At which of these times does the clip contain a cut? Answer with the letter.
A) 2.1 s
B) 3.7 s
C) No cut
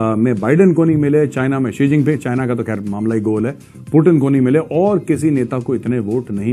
C